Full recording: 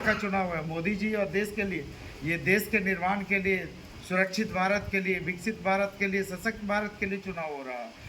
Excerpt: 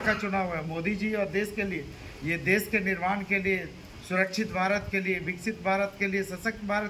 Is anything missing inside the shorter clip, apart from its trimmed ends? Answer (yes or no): no